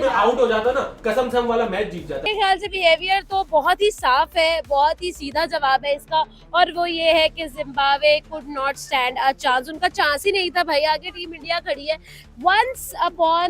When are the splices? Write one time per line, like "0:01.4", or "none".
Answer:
0:02.2